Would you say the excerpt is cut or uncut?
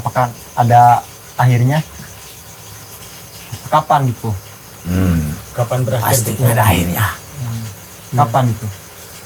uncut